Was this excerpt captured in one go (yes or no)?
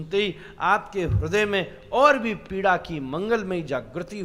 yes